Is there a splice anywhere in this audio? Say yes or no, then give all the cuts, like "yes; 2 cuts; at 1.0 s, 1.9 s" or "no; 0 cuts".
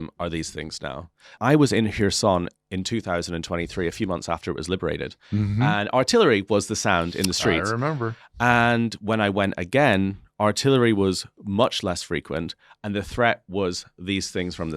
yes; 1 cut; at 1.4 s